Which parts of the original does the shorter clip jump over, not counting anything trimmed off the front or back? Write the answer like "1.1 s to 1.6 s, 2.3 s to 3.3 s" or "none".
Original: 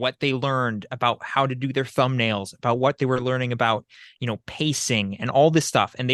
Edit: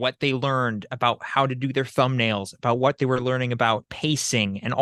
3.9 s to 4.5 s